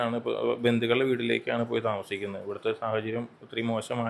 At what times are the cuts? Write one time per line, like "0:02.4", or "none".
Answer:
none